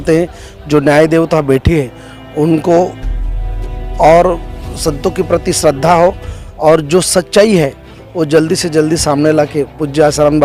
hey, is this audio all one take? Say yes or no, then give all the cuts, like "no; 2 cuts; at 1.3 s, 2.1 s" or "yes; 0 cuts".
yes; 0 cuts